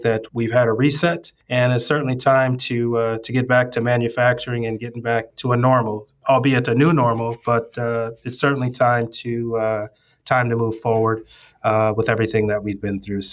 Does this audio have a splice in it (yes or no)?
yes